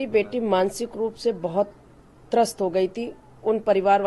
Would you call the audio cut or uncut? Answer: uncut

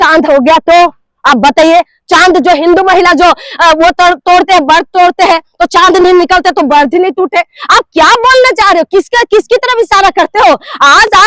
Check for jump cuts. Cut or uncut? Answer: uncut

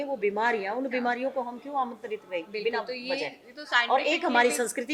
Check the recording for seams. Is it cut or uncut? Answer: uncut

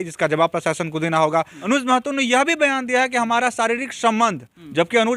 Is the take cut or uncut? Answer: cut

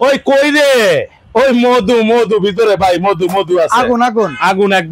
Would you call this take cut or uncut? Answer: uncut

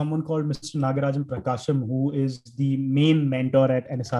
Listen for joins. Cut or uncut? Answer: uncut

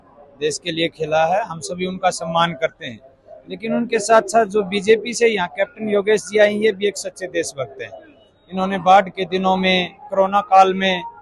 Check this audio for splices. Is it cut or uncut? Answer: uncut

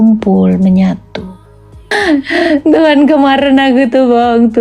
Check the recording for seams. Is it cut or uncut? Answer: cut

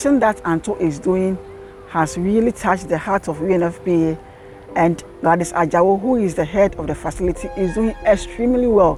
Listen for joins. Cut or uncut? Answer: uncut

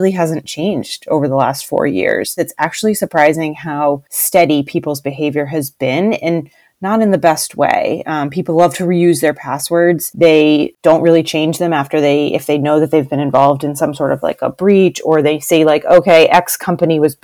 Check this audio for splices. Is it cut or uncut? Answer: cut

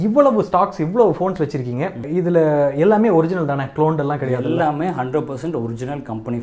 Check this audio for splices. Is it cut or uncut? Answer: uncut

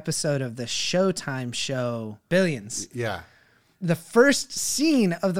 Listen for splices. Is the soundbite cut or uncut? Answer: cut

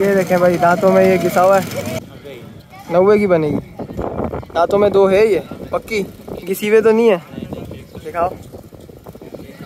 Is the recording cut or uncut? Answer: cut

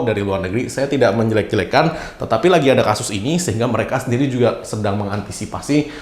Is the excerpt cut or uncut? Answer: uncut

